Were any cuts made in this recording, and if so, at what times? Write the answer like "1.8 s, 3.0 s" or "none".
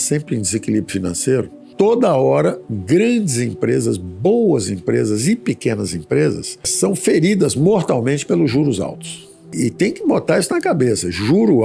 1.6 s, 2.7 s